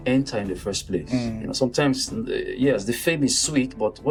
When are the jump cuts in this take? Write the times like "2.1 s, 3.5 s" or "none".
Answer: none